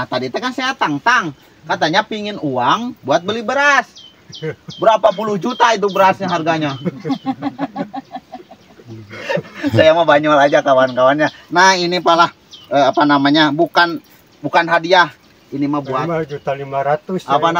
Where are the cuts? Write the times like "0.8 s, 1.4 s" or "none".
none

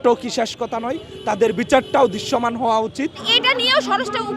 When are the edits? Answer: 3.3 s

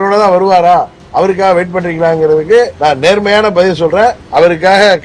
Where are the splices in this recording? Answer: 2.7 s, 4.2 s

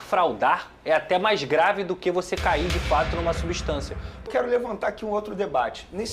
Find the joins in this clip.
4.2 s

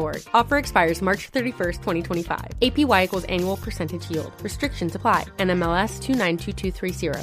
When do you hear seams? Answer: none

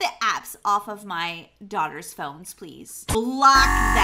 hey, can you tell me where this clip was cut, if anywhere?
3.1 s

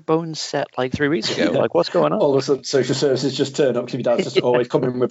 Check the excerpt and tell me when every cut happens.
none

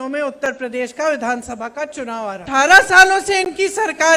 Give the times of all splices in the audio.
2.4 s

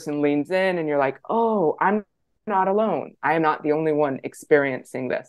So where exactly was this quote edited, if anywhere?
none

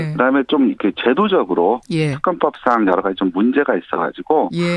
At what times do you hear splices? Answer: 3.3 s

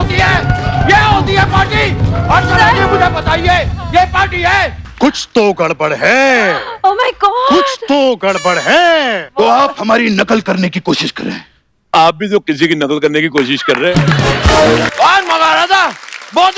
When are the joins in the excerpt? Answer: 4.8 s, 9.2 s, 14.9 s

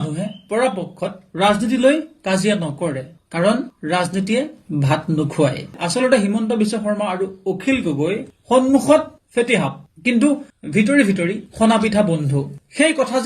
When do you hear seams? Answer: 5.7 s

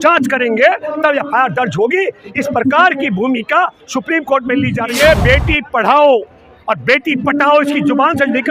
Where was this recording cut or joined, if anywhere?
4.9 s

